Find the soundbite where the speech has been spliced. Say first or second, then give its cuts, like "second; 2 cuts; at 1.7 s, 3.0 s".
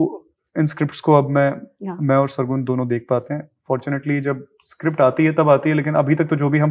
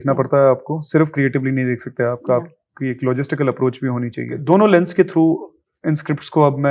second; 1 cut; at 4.3 s